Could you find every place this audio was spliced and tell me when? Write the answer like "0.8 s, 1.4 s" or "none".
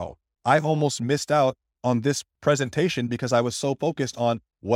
2.3 s